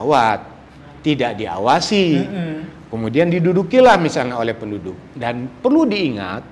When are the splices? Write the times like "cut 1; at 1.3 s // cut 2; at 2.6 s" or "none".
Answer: none